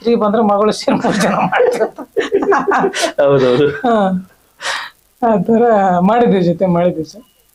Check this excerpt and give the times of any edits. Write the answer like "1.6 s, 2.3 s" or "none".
none